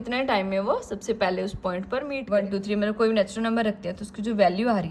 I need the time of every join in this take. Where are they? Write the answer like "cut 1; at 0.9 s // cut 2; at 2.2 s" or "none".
cut 1; at 2.2 s